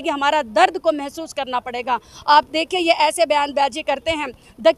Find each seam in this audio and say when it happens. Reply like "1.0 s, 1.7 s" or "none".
none